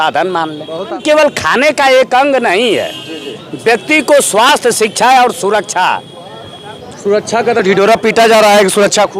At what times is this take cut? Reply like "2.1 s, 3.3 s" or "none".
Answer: 0.9 s